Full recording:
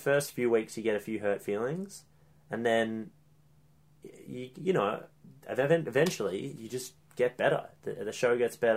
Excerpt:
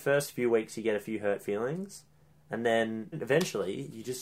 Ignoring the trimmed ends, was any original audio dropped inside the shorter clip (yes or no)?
yes